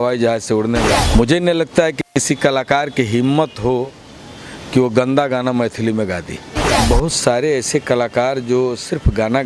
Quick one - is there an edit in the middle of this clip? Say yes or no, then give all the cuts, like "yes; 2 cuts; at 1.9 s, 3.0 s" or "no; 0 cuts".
yes; 2 cuts; at 1.0 s, 6.8 s